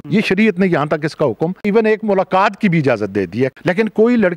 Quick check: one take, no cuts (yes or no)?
no